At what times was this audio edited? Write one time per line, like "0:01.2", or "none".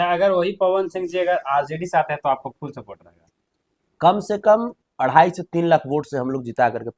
none